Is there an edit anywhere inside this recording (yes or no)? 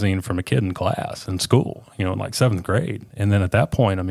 no